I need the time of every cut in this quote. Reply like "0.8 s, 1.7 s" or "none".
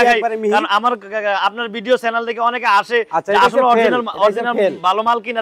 none